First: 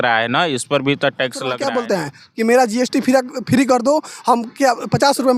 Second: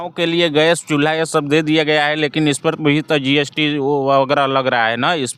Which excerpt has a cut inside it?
first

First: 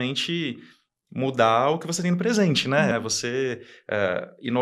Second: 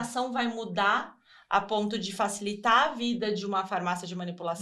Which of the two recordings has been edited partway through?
first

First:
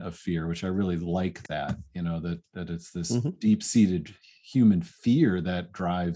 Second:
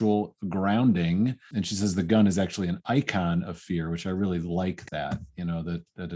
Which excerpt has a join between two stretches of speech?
second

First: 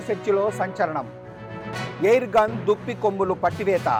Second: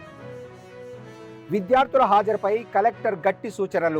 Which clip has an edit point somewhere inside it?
second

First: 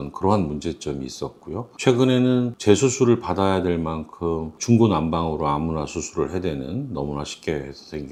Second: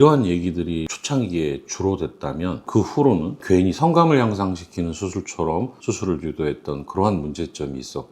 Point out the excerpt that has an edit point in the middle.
second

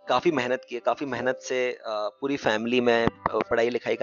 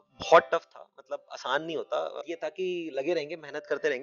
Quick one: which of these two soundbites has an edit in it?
second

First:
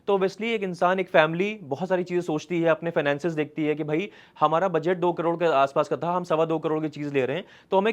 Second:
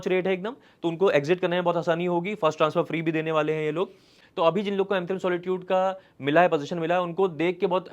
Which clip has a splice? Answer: second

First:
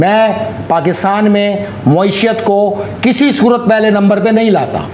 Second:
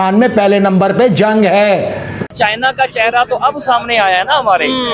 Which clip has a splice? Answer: second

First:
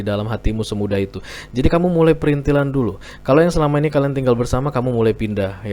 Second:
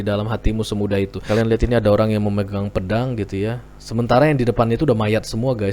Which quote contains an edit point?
second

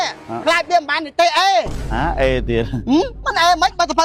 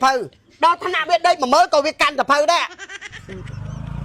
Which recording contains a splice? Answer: second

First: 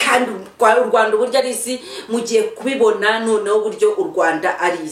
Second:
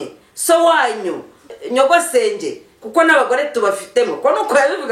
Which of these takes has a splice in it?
second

